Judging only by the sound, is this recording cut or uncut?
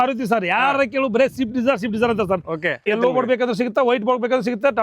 cut